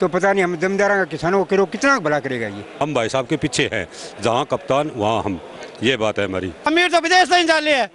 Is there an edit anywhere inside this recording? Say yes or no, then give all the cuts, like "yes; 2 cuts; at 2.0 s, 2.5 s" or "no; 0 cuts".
yes; 2 cuts; at 2.7 s, 6.7 s